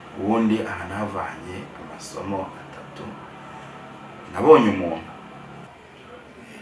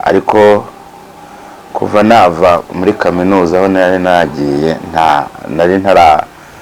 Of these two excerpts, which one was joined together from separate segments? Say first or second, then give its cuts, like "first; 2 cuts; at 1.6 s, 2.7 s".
first; 1 cut; at 5.7 s